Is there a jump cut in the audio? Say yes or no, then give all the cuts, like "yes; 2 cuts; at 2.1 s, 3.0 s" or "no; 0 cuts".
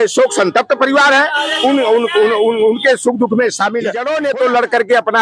yes; 1 cut; at 4.0 s